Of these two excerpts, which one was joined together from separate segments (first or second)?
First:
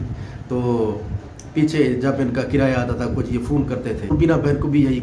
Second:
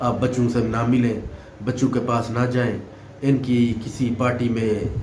first